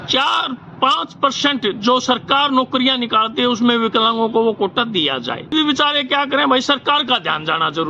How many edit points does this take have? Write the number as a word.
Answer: one